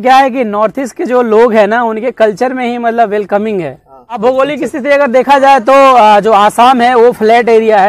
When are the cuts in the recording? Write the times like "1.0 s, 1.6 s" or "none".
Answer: 4.2 s